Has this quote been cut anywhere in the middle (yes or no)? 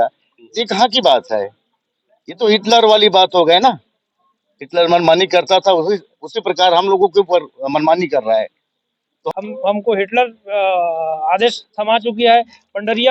yes